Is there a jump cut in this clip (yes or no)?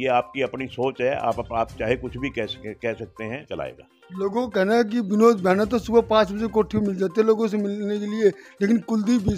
yes